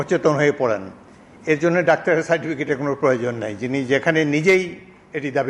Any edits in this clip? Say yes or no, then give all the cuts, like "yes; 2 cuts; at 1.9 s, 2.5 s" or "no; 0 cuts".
no; 0 cuts